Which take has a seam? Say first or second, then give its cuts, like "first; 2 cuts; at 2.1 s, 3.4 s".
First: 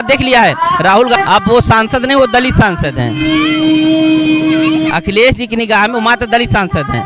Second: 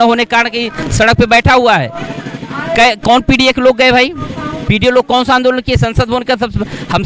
first; 1 cut; at 1.2 s